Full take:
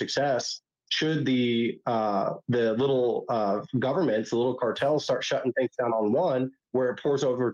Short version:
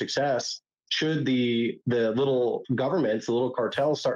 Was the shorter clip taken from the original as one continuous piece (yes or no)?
no